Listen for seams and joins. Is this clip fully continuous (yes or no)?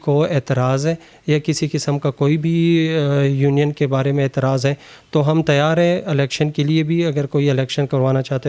yes